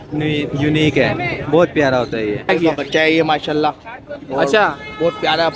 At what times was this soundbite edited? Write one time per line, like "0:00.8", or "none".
0:02.5